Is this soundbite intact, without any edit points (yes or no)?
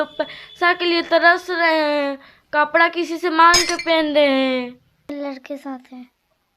no